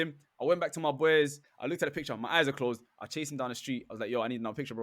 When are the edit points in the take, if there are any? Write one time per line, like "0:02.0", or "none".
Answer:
0:01.5